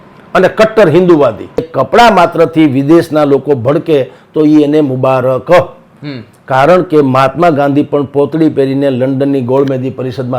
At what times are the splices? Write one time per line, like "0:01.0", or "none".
0:01.7